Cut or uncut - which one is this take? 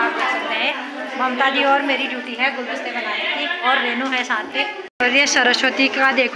cut